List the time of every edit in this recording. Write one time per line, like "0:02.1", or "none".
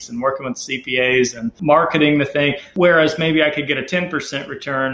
0:01.5
0:02.6